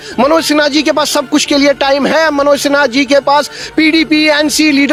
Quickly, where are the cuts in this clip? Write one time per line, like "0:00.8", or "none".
none